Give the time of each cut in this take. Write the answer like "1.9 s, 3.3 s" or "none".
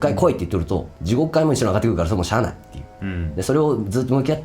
0.9 s